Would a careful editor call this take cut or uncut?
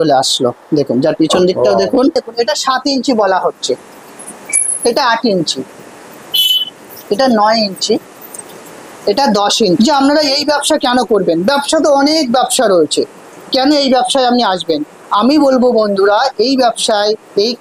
cut